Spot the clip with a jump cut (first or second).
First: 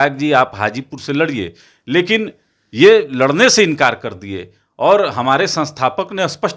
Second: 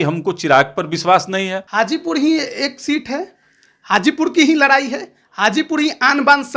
second